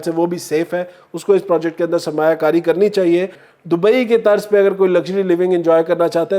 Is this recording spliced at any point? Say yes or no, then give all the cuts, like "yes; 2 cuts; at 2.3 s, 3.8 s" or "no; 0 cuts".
yes; 1 cut; at 3.4 s